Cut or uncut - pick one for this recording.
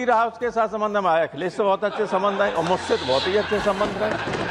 uncut